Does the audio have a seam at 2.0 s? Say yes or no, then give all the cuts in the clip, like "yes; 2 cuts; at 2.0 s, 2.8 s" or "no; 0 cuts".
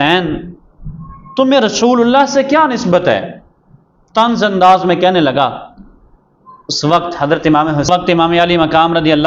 no; 1 cut; at 7.9 s